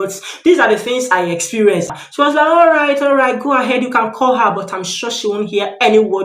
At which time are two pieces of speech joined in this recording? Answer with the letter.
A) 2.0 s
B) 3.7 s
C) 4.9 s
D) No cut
A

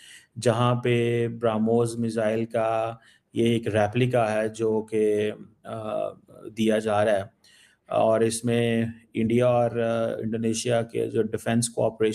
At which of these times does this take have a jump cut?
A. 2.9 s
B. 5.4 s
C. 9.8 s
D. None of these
D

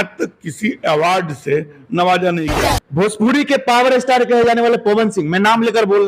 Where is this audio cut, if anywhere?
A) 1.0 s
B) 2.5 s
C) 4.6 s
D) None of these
B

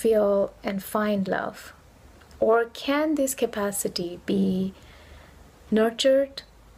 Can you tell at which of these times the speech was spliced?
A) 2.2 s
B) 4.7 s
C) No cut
C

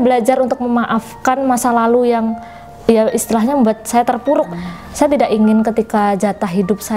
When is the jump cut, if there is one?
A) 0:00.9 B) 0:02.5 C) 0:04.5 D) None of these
C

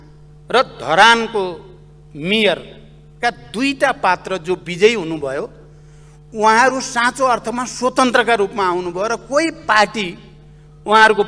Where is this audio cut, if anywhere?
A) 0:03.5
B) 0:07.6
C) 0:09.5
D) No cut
D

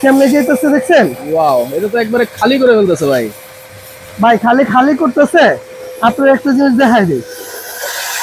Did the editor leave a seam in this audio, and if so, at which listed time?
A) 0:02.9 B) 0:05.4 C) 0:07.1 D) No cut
D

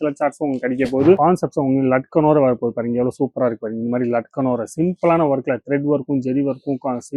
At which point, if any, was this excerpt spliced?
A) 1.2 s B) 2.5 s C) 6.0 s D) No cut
A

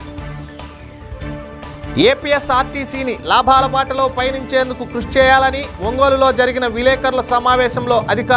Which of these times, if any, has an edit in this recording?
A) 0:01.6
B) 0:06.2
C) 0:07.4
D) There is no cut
A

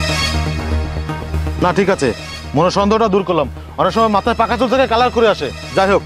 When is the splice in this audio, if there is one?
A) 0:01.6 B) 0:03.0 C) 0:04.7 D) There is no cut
A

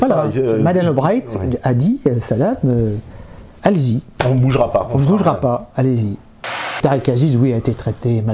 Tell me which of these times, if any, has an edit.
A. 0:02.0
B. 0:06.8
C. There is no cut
B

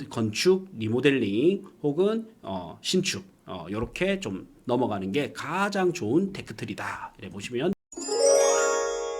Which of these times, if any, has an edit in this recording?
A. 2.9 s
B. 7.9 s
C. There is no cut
B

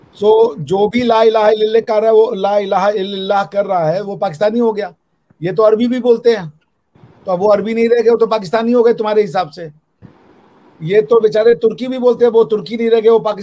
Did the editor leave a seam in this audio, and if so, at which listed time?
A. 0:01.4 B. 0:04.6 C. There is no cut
C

